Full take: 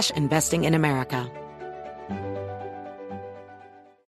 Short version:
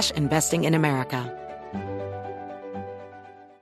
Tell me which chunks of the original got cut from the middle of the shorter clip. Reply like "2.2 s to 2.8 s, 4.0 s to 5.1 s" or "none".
1.3 s to 1.6 s